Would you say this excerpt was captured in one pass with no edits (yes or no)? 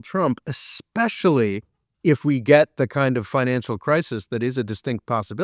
yes